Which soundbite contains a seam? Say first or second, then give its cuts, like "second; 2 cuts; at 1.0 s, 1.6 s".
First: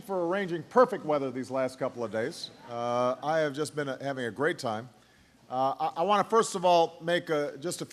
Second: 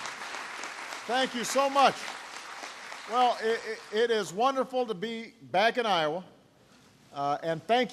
second; 1 cut; at 4.1 s